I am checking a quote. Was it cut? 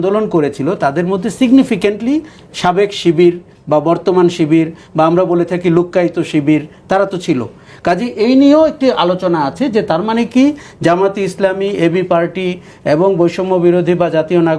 no; 0 cuts

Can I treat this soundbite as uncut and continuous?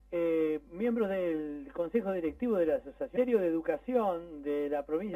yes; 0 cuts

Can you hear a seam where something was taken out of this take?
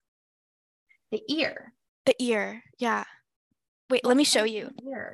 no; 0 cuts

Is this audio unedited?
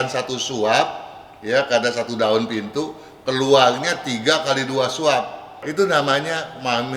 no; 1 cut; at 5.6 s

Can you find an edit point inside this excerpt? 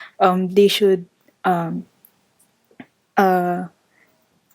no; 0 cuts

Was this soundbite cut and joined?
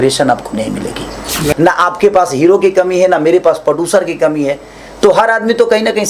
yes; 1 cut; at 1.4 s

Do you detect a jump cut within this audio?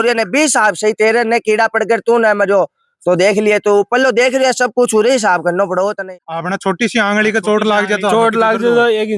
yes; 1 cut; at 6.0 s

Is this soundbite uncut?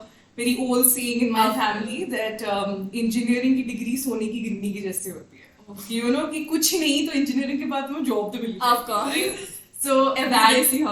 yes; 0 cuts

